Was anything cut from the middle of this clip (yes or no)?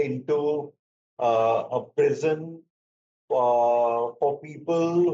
no